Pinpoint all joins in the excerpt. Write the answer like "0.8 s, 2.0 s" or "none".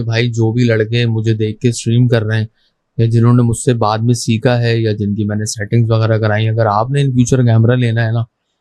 none